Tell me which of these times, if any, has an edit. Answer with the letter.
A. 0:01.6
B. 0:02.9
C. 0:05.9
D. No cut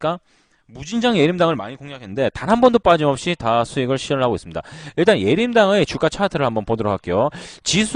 C